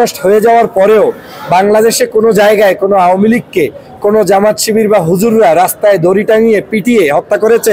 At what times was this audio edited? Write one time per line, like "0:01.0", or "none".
none